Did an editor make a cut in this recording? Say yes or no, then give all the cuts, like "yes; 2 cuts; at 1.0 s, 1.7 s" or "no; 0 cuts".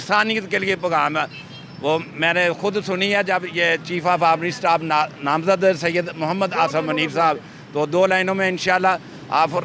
no; 0 cuts